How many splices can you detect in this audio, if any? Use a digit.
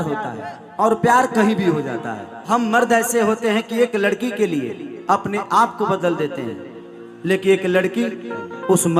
1